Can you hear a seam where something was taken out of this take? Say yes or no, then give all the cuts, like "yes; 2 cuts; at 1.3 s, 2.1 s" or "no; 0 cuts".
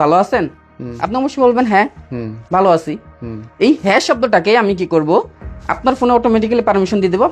no; 0 cuts